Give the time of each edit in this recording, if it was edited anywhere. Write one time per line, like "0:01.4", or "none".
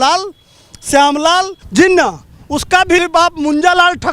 0:01.6
0:03.0

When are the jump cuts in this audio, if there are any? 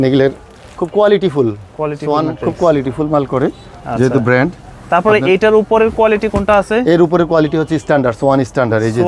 none

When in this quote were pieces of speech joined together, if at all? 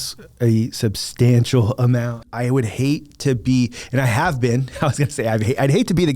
0:02.3

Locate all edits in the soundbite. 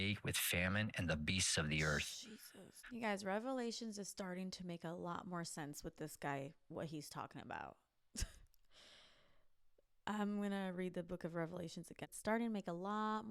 0:02.8
0:11.9

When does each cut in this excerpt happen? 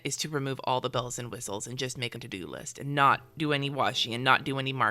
0:02.2

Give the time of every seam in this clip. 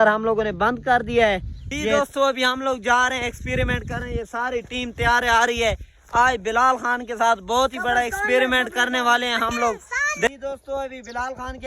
0:01.9
0:10.3

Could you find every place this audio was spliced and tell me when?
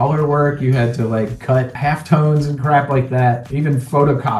0:01.7
0:03.5

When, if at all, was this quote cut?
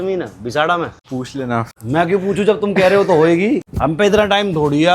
0:01.4
0:03.7

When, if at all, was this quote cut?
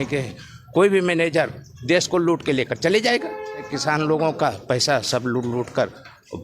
0:03.7

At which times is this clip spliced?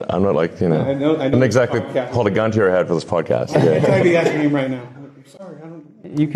0:01.3

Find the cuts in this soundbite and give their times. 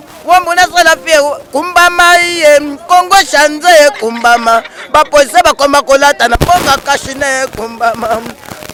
none

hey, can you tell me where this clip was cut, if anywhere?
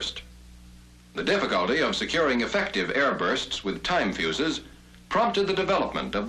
none

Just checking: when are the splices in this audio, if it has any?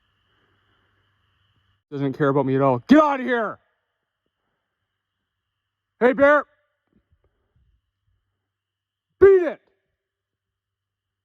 0:02.0

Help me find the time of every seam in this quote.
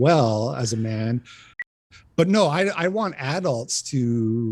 0:01.8

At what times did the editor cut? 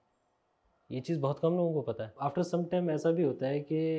none

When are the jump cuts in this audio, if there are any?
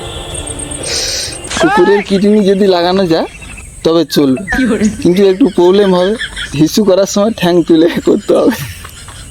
0:01.4
0:06.6

